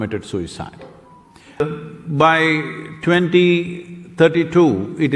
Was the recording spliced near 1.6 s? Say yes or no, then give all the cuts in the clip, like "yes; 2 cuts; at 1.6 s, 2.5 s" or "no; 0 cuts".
yes; 1 cut; at 1.6 s